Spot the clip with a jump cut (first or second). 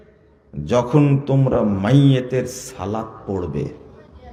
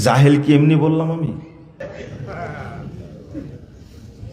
second